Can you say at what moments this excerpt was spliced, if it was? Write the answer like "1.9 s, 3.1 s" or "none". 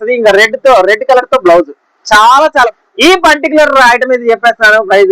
2.7 s